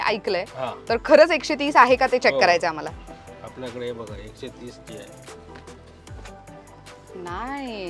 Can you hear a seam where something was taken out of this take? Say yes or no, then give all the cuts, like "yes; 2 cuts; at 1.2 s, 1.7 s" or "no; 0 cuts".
no; 0 cuts